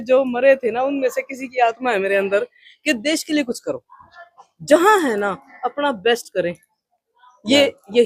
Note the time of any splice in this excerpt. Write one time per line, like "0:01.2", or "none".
none